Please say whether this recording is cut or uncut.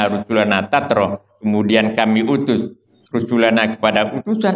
uncut